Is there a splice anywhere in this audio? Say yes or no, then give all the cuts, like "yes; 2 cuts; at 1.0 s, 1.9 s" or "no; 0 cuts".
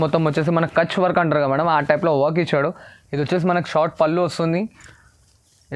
no; 0 cuts